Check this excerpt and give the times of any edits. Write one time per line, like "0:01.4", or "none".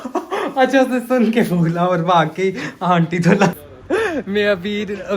0:03.6